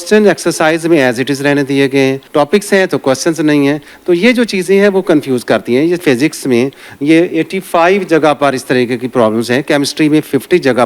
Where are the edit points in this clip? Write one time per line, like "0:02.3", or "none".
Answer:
0:02.2
0:06.0